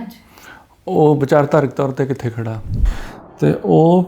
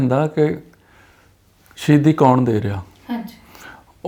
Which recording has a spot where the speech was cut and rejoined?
first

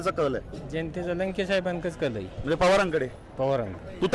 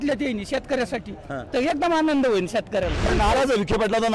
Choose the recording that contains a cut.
second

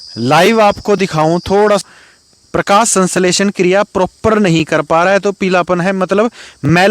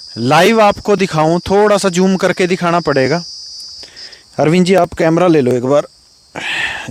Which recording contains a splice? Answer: first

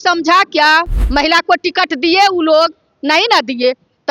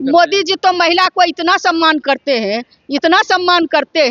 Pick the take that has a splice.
first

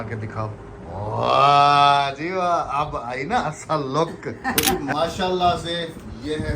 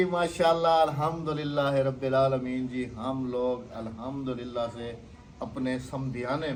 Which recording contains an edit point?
first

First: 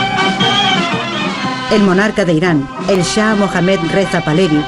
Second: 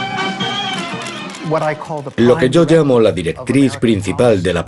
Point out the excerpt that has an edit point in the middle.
first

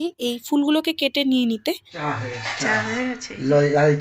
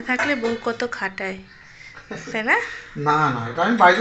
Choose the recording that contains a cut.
first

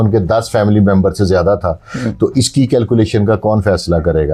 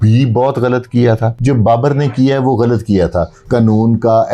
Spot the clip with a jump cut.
second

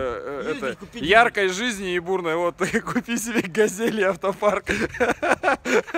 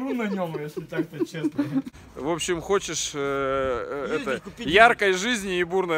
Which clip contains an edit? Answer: second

